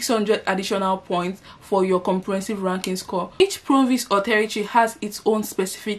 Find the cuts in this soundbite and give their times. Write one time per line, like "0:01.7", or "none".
0:03.4